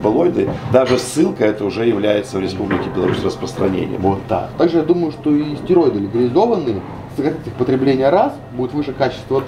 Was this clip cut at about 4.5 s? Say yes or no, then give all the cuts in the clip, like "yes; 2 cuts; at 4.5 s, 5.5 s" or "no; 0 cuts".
yes; 1 cut; at 4.5 s